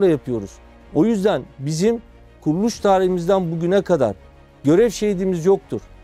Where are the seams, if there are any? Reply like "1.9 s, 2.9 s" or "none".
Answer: none